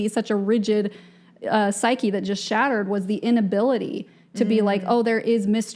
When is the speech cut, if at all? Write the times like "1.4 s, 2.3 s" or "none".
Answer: none